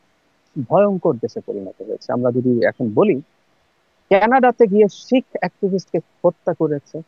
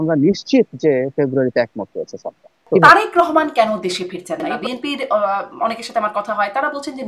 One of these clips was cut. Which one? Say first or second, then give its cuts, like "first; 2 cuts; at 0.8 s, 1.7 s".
second; 2 cuts; at 2.7 s, 4.5 s